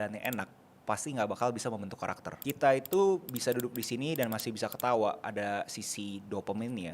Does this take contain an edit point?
yes; 1 cut; at 2.3 s

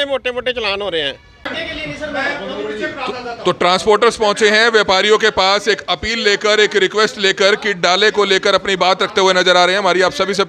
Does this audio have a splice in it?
yes; 1 cut; at 1.4 s

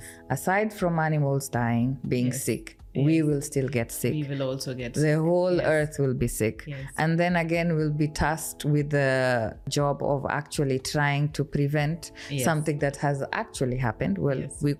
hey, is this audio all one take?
yes; 0 cuts

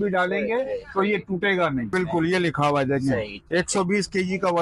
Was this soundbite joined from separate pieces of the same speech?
yes; 1 cut; at 1.9 s

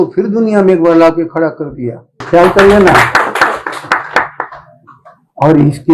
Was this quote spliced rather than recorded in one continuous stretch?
yes; 1 cut; at 2.3 s

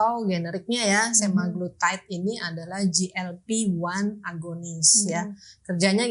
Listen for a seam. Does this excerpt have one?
no; 0 cuts

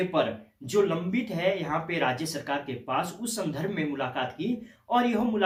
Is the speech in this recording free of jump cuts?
yes; 0 cuts

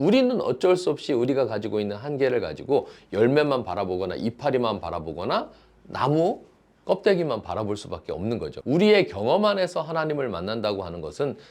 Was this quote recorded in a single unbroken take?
no; 1 cut; at 8.5 s

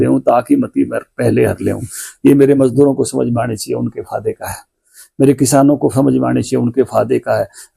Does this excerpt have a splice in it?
no; 0 cuts

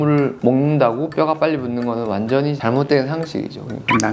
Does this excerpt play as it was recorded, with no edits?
yes; 0 cuts

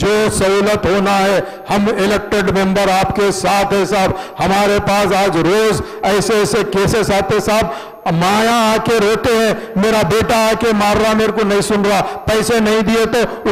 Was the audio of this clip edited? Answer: no; 0 cuts

